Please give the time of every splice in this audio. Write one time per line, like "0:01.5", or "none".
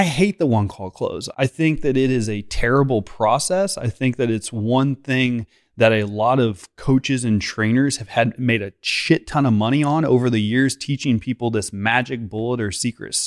0:01.2